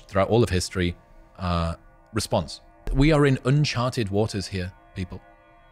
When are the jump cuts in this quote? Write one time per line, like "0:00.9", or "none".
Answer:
0:02.9

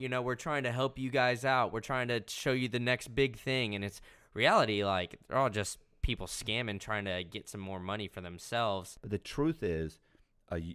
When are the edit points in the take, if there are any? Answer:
0:08.9

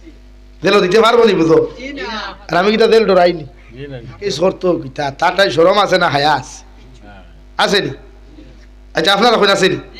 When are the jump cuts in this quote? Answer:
0:04.3

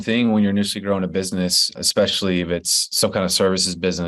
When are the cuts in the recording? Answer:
0:01.7

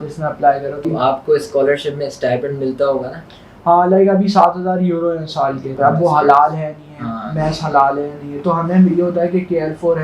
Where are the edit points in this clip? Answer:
0:00.8
0:05.7

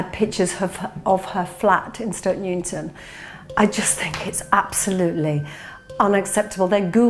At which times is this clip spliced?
none

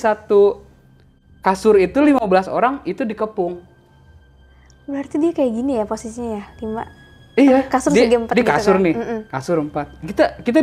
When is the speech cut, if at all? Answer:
none

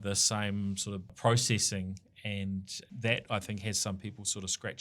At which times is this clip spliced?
0:01.0
0:02.9

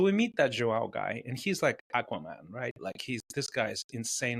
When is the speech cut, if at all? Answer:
none

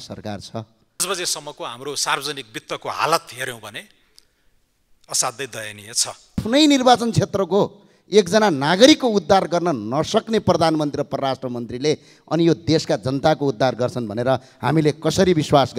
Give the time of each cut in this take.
0:01.0
0:06.4

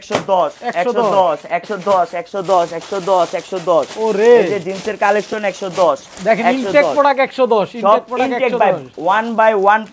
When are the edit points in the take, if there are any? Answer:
none

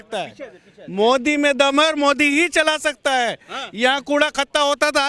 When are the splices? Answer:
none

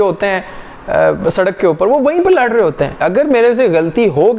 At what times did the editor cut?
0:03.0

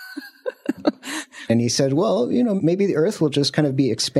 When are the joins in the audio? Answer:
0:01.5
0:02.6

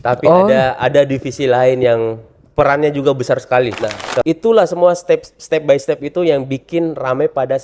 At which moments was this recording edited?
0:04.2

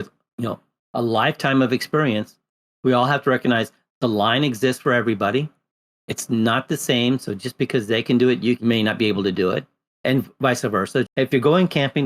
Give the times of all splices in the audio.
0:08.6
0:09.9
0:11.1

